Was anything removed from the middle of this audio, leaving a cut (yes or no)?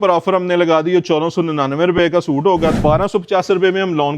yes